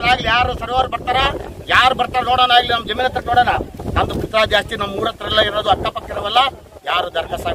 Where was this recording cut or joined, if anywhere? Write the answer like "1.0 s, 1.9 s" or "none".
none